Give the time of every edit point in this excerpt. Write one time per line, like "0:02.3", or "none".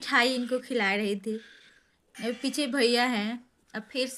none